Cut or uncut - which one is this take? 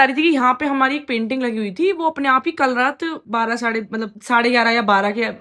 uncut